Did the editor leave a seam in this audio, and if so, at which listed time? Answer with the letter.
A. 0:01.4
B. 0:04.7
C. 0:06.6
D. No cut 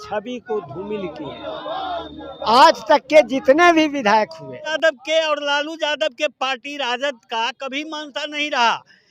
B